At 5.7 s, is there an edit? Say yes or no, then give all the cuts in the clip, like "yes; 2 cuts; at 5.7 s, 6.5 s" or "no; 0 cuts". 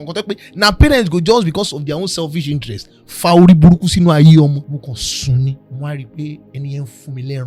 yes; 3 cuts; at 4.6 s, 5.7 s, 6.5 s